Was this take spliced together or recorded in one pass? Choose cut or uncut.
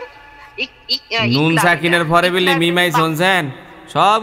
uncut